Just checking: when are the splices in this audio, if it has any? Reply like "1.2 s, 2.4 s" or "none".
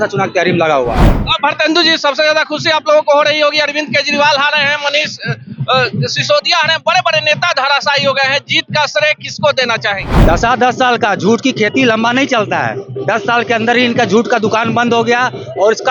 10.1 s

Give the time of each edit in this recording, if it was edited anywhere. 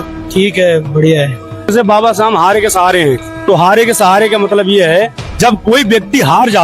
1.7 s

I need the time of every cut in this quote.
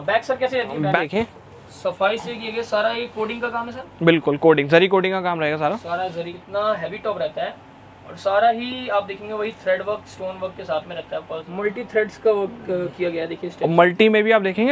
1.0 s, 6.4 s, 11.5 s

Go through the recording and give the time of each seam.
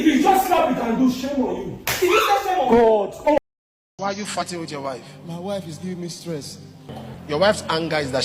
3.4 s, 7.0 s

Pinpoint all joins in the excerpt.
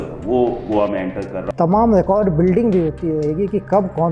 1.4 s

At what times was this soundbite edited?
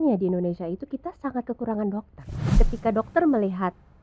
2.4 s

